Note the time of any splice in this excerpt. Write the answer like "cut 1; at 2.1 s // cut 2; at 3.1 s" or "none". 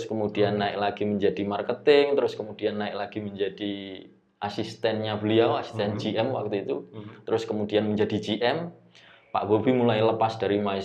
none